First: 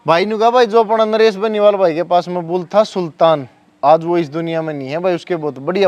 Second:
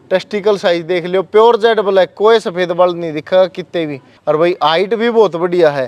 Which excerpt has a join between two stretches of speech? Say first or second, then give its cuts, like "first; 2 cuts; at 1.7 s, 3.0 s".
second; 1 cut; at 4.1 s